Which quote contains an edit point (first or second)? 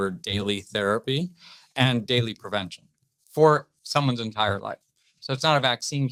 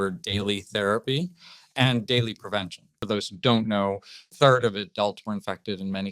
second